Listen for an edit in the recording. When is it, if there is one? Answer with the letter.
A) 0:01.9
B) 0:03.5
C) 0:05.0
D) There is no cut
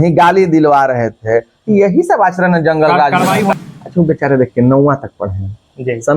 B